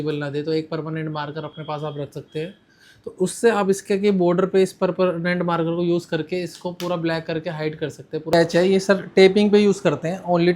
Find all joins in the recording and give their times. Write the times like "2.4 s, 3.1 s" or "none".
8.3 s